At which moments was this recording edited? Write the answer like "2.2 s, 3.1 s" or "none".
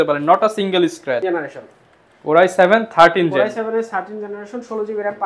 1.2 s